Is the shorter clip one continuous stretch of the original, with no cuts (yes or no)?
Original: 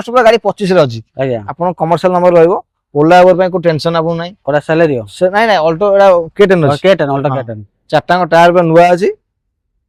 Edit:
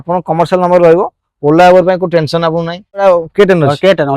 no